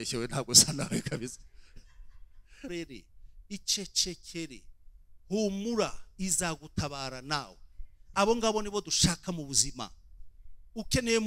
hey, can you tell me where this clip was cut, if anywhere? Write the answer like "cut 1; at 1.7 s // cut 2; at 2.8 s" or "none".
cut 1; at 2.7 s